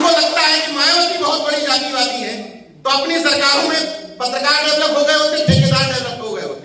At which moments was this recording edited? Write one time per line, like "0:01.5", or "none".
none